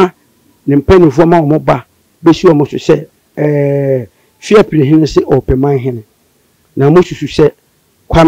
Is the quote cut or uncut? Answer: cut